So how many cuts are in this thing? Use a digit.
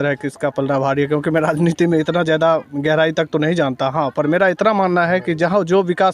0